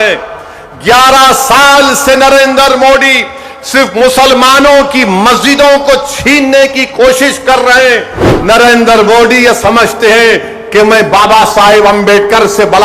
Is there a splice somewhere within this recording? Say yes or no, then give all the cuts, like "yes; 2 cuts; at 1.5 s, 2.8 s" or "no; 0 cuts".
yes; 1 cut; at 8.3 s